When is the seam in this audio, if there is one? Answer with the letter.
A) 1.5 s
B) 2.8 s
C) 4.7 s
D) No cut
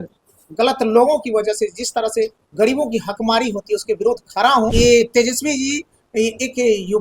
C